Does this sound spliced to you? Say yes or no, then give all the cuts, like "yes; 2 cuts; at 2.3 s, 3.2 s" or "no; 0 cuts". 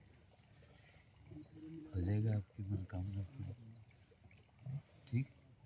no; 0 cuts